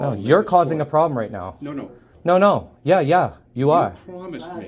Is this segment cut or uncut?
uncut